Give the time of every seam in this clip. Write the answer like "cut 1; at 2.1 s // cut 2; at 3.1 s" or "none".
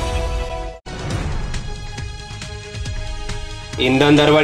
cut 1; at 0.7 s // cut 2; at 2.7 s // cut 3; at 3.8 s